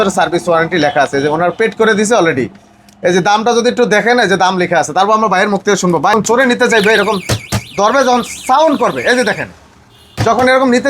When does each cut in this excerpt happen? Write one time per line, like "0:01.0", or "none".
0:06.1

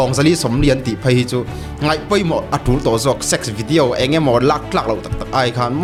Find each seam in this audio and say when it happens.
none

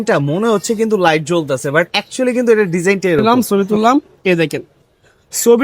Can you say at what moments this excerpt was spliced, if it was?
0:03.2

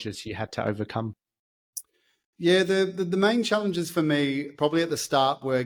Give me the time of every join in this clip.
none

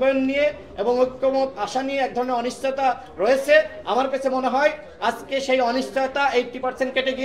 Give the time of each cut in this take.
none

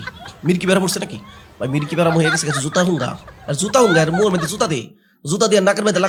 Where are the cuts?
none

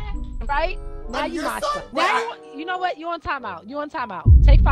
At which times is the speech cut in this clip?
0:01.9

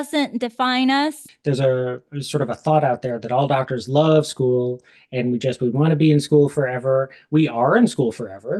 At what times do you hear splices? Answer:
0:01.3

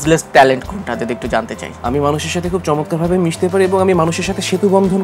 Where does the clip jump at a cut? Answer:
0:01.6

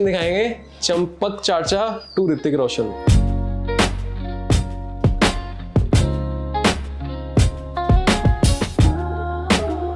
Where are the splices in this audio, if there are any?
none

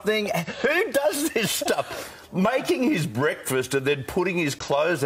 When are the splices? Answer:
0:02.0

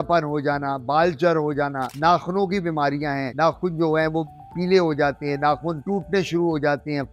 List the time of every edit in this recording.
none

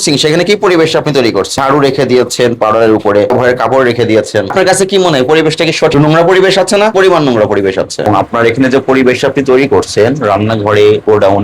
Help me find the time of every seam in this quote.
0:08.0

